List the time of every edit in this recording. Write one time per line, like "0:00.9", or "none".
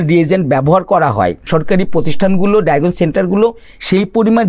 0:01.5